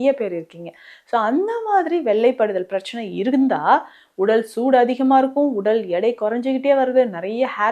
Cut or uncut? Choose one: uncut